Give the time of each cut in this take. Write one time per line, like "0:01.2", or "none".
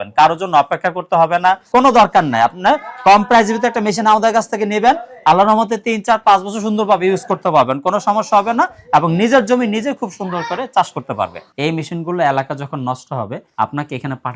0:01.6
0:11.4
0:13.4